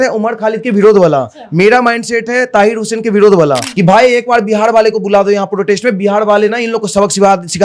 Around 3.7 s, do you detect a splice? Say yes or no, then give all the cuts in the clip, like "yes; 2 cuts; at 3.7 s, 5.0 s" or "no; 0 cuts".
yes; 1 cut; at 3.7 s